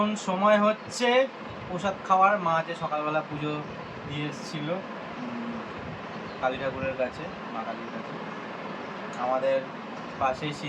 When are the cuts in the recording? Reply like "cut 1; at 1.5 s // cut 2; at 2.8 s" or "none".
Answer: none